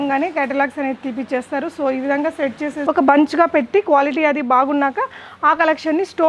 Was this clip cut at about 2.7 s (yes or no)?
yes